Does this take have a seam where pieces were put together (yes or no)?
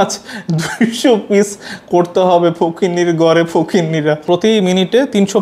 yes